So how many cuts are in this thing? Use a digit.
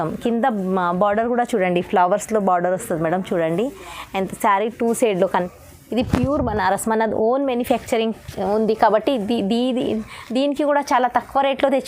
1